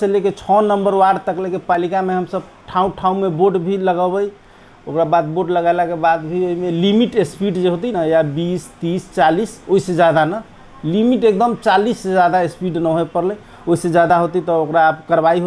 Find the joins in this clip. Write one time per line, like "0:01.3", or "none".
none